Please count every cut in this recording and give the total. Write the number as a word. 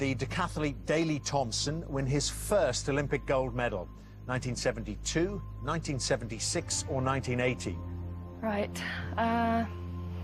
one